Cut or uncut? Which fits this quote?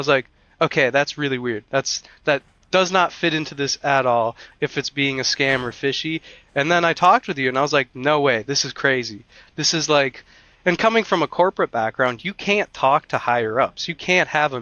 uncut